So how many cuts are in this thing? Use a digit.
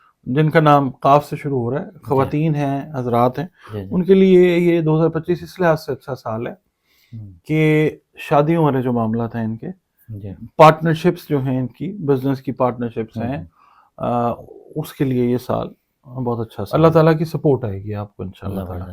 1